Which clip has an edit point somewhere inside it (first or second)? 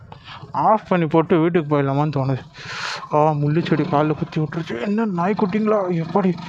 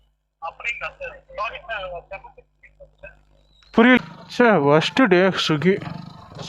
second